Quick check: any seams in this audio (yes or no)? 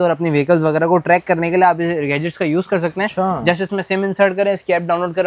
no